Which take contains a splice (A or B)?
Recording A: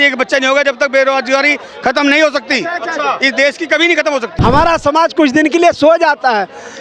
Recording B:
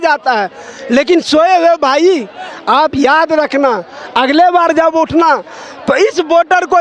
A